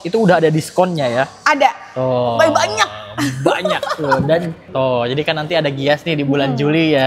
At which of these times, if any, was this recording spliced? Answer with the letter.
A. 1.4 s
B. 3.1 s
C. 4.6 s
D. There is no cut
C